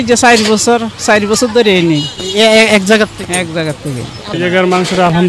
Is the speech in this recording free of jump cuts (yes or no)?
no